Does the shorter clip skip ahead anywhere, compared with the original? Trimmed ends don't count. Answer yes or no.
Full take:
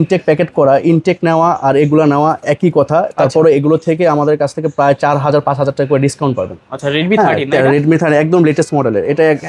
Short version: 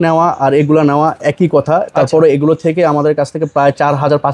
no